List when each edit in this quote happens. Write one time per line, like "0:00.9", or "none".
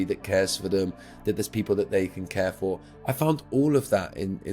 none